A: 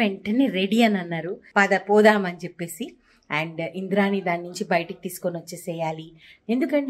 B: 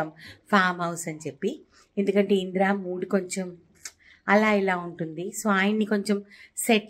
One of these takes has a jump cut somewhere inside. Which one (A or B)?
A